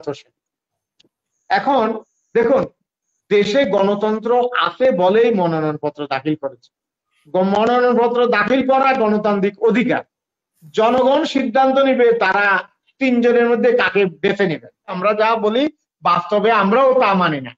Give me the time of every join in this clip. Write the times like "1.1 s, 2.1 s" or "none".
15.0 s